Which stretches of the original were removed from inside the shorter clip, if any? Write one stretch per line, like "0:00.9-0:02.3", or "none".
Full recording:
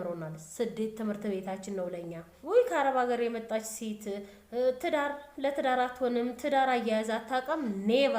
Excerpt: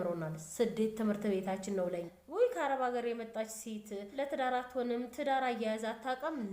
0:02.2-0:02.3
0:04.2-0:05.3